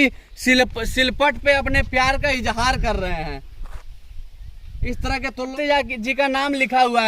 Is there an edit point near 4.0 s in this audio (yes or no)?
no